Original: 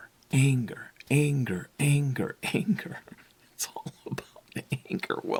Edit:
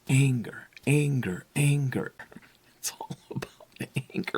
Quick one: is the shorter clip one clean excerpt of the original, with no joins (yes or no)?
no